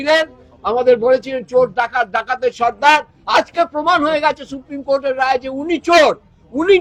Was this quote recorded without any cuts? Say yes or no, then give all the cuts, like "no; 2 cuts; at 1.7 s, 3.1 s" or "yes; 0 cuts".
yes; 0 cuts